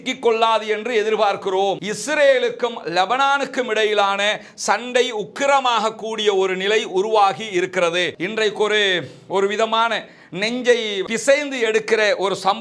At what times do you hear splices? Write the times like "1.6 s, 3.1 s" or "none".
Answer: 1.8 s, 8.2 s